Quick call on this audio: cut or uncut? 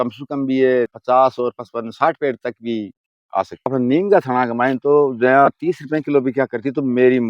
cut